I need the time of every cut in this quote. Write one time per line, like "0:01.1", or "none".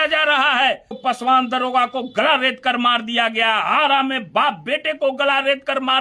0:00.9